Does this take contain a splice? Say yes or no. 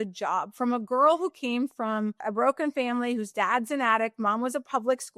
yes